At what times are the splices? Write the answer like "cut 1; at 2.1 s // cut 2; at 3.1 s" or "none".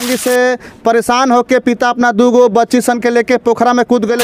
none

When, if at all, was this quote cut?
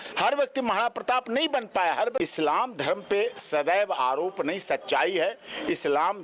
cut 1; at 2.2 s

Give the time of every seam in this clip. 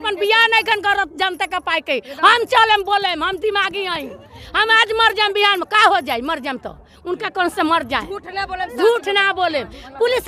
none

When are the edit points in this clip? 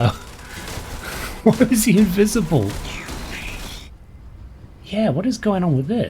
cut 1; at 3.8 s

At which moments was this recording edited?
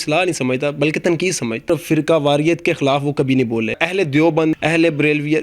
cut 1; at 1.7 s // cut 2; at 3.8 s // cut 3; at 4.6 s

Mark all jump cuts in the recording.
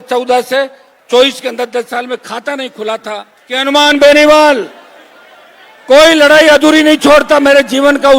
cut 1; at 3.6 s

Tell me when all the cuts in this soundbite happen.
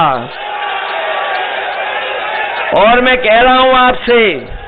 none

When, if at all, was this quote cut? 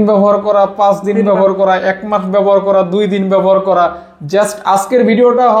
none

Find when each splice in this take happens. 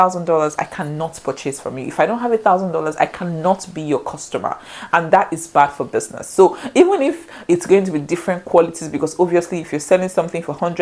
none

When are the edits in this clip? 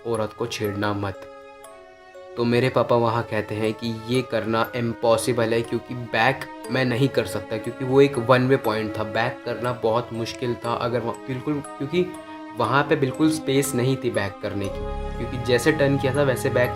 none

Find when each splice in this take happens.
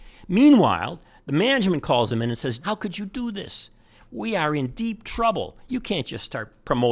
cut 1; at 2.6 s

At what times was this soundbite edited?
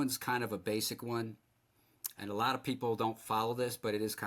none

